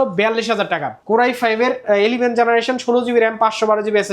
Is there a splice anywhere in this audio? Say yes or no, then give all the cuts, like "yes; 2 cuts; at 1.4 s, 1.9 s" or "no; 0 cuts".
yes; 1 cut; at 0.9 s